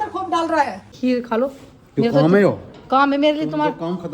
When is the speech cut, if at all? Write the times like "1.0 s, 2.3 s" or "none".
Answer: 0.9 s